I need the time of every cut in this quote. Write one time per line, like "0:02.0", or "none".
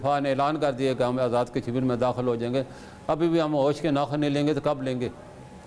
none